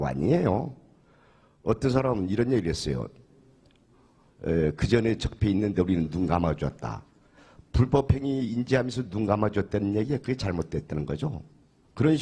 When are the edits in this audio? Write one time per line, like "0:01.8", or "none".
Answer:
none